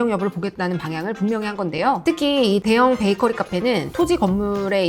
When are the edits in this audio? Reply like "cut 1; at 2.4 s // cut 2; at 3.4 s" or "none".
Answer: cut 1; at 2.0 s